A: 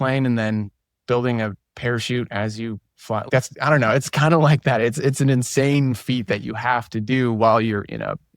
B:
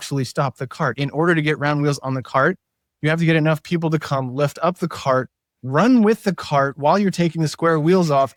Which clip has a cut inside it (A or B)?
A